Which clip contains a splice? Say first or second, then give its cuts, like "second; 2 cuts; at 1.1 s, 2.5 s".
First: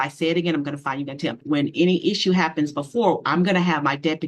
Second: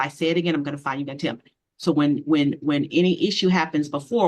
first; 1 cut; at 1.4 s